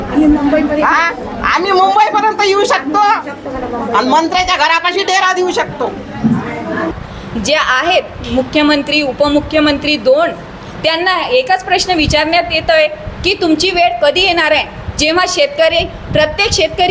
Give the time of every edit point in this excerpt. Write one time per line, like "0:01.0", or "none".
0:07.1